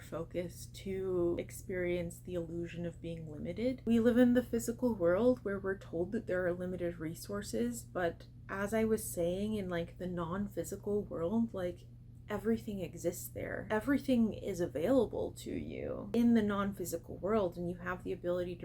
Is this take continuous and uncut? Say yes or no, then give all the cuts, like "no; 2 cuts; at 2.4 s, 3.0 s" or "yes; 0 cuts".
no; 4 cuts; at 1.5 s, 3.8 s, 13.6 s, 16.0 s